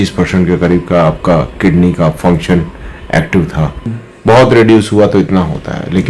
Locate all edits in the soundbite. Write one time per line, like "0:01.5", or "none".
0:03.8